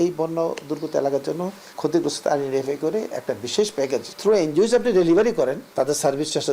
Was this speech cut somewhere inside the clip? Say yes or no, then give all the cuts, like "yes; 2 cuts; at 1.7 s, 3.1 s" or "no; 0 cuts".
yes; 3 cuts; at 1.6 s, 4.1 s, 5.6 s